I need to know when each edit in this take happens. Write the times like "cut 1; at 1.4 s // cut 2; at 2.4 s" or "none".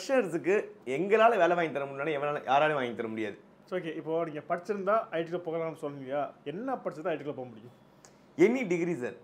cut 1; at 3.6 s